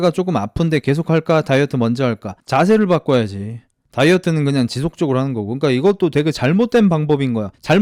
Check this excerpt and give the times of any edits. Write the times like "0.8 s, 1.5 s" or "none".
none